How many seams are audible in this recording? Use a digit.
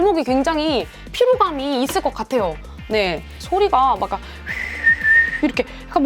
1